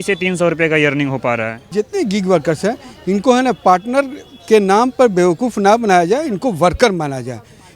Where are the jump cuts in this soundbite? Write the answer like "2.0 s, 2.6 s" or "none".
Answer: 1.8 s